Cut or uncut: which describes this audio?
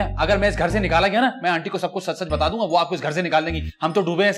uncut